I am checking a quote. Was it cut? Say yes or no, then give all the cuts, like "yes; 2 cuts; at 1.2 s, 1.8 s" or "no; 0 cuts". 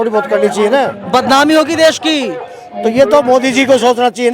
yes; 1 cut; at 1.0 s